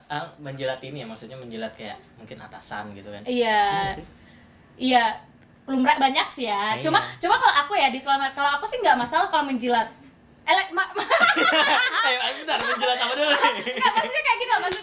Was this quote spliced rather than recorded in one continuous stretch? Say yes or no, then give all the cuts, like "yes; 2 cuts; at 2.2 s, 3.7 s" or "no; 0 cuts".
no; 0 cuts